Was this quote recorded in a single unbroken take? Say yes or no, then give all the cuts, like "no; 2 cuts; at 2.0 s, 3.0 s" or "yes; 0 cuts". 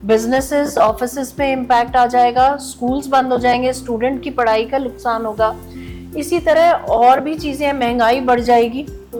yes; 0 cuts